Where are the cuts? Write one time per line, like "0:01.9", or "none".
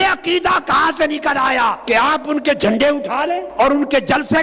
0:01.8
0:03.5